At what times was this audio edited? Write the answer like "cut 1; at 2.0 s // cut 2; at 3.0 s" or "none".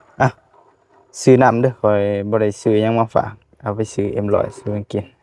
none